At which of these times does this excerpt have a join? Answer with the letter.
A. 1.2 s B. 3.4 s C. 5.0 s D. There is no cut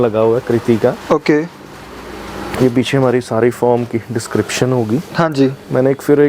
D